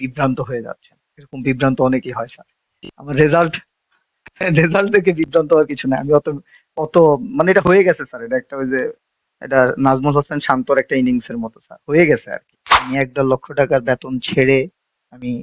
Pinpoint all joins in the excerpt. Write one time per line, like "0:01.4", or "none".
0:12.8